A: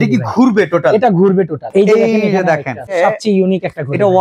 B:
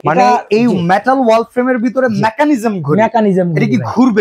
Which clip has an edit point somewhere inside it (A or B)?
A